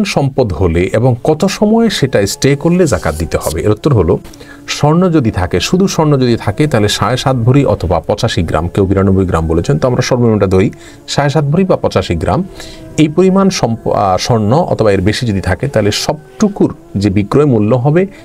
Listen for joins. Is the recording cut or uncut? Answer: uncut